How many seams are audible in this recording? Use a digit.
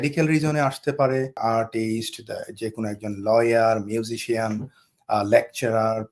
1